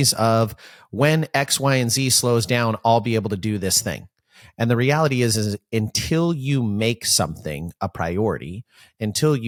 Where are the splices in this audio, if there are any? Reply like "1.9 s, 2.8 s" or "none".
none